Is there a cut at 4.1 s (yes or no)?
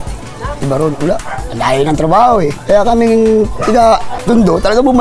yes